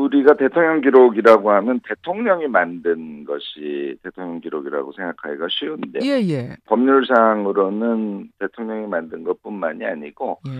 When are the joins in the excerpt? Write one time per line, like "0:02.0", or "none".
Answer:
0:09.5